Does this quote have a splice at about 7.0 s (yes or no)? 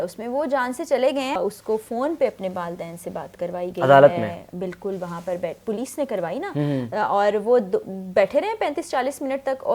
no